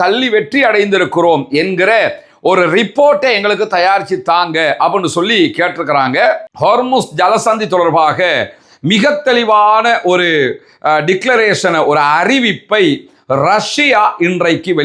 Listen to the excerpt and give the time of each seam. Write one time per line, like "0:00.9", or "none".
0:06.5